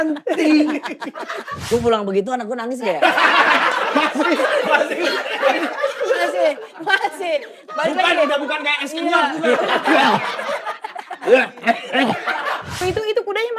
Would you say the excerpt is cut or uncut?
cut